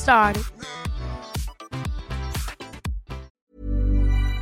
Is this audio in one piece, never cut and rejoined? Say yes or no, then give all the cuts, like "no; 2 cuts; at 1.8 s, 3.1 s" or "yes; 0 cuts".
no; 1 cut; at 3.3 s